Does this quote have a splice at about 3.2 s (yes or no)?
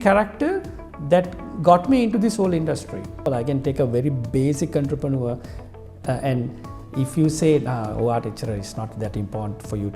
yes